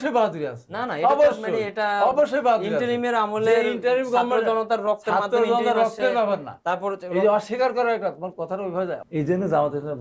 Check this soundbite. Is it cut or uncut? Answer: cut